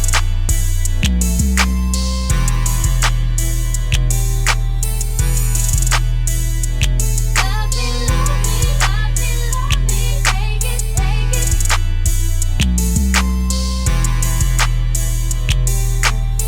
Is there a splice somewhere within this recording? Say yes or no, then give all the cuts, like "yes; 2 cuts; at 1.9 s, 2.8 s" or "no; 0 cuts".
no; 0 cuts